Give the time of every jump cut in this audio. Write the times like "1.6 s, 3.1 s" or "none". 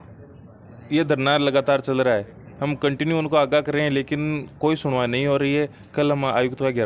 none